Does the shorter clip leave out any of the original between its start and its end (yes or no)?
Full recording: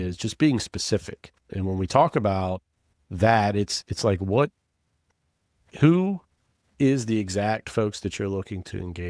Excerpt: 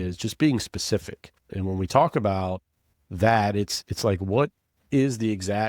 yes